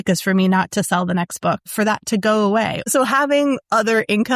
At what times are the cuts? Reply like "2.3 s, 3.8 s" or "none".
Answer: 1.6 s, 2.9 s